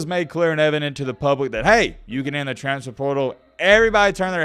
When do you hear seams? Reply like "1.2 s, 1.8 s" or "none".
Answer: none

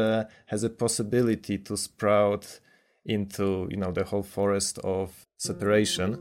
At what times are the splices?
5.1 s

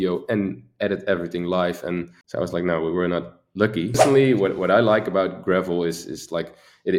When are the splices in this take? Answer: 2.2 s, 4.0 s

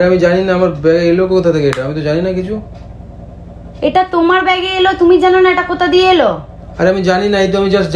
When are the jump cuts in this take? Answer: none

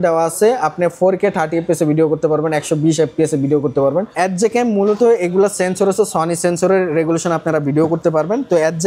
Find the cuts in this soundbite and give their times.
4.1 s

